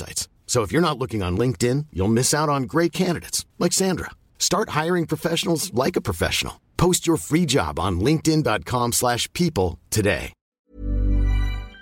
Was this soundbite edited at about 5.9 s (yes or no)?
no